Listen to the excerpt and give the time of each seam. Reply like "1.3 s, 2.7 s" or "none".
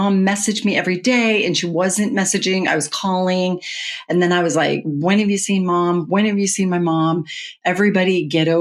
none